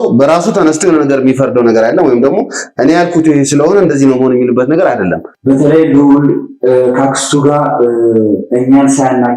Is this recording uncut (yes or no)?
no